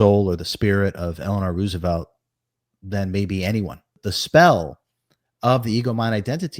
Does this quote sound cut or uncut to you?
cut